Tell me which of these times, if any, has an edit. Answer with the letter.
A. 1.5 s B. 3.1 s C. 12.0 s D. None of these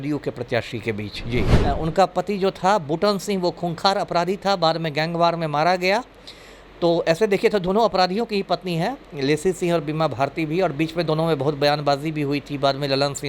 A